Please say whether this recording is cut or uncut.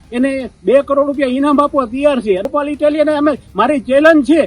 cut